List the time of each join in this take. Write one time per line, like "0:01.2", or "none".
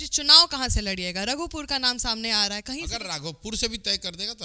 0:02.9